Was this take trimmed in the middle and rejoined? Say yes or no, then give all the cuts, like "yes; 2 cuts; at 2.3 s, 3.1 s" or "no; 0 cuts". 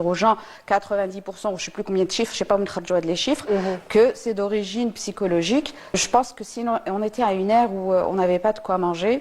yes; 1 cut; at 6.0 s